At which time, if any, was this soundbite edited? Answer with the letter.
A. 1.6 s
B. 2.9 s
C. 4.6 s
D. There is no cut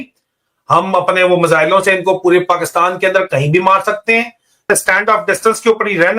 C